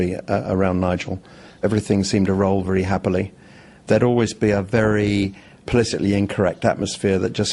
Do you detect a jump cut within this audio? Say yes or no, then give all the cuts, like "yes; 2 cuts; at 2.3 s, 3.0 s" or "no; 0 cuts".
no; 0 cuts